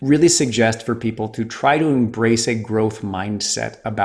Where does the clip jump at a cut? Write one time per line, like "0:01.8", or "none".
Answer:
none